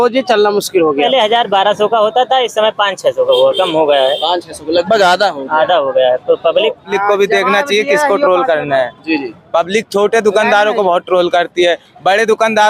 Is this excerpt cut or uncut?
cut